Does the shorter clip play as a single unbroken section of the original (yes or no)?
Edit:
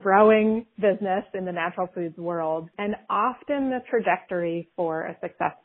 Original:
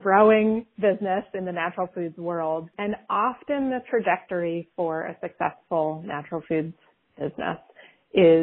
yes